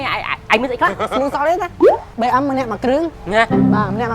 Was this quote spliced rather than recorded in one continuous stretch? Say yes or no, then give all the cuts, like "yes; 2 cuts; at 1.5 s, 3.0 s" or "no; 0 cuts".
yes; 2 cuts; at 1.1 s, 2.1 s